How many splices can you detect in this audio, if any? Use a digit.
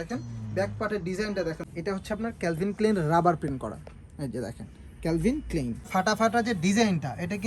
2